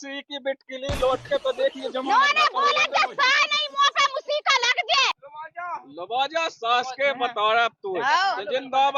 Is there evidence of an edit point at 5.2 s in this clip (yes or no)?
yes